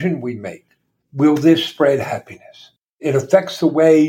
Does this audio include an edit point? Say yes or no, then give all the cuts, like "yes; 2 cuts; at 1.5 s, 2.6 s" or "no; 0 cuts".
yes; 1 cut; at 3.0 s